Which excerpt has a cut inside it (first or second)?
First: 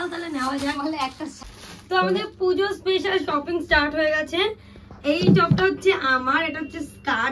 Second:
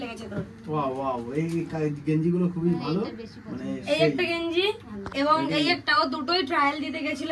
first